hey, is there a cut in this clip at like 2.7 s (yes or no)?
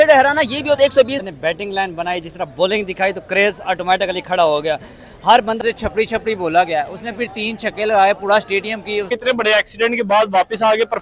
no